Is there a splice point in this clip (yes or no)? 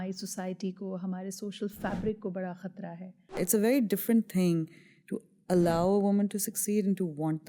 yes